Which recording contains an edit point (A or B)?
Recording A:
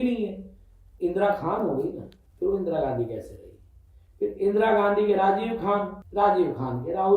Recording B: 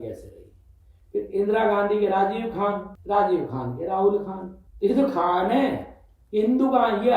A